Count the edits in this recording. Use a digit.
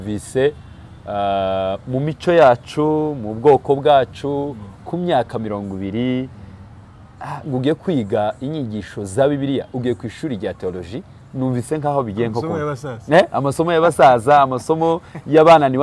0